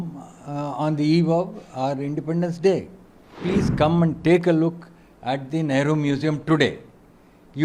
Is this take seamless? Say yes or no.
no